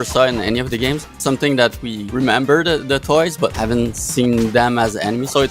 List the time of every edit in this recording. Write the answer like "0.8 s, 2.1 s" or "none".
1.1 s, 1.9 s, 3.5 s